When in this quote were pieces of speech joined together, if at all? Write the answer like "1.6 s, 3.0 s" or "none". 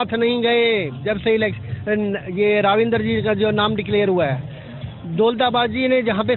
none

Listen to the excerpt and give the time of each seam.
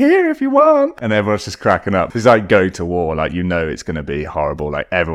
0.9 s, 2.1 s

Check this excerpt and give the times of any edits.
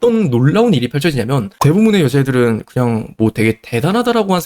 1.5 s

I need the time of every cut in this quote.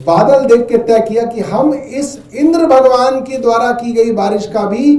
none

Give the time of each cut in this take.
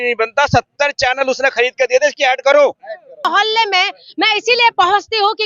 3.3 s

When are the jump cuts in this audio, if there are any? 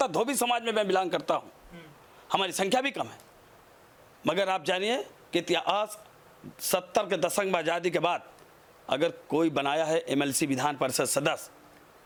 none

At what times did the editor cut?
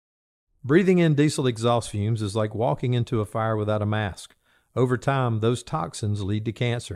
none

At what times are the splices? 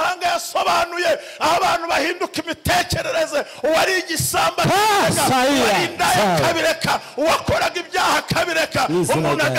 none

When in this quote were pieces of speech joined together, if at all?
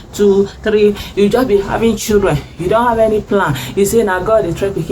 1.0 s

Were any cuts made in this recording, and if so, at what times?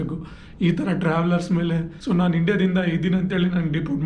1.9 s

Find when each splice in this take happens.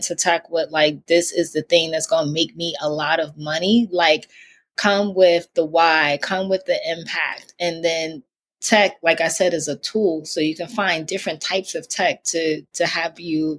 none

